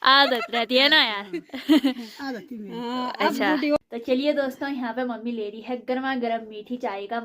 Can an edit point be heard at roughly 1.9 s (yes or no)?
no